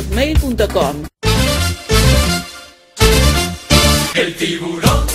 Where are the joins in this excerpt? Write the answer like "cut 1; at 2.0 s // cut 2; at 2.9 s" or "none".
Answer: cut 1; at 1.0 s

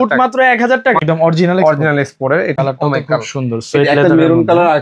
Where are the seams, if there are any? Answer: cut 1; at 1.0 s // cut 2; at 2.6 s

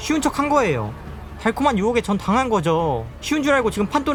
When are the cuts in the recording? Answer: none

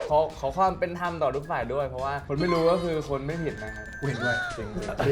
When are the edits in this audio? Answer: cut 1; at 3.9 s

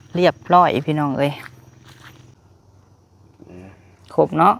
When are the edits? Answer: cut 1; at 2.3 s

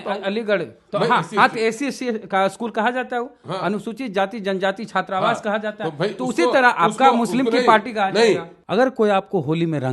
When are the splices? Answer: cut 1; at 8.5 s

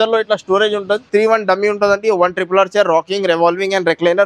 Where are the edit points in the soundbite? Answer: cut 1; at 1.0 s

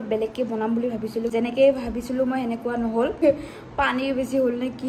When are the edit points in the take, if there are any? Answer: cut 1; at 1.3 s // cut 2; at 3.2 s

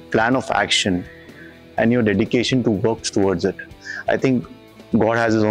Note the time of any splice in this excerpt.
none

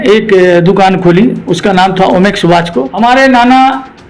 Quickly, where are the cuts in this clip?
cut 1; at 2.9 s

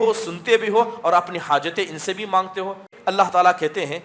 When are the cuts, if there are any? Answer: cut 1; at 2.9 s

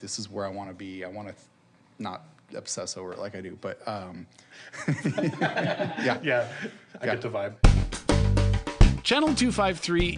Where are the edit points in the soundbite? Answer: cut 1; at 7.5 s

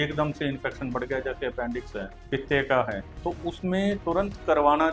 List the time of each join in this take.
cut 1; at 2.2 s // cut 2; at 3.1 s

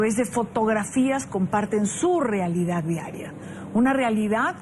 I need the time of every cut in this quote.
cut 1; at 1.5 s

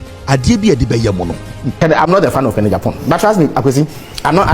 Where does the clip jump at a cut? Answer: cut 1; at 1.8 s

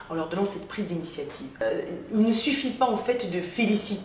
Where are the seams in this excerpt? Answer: cut 1; at 1.6 s

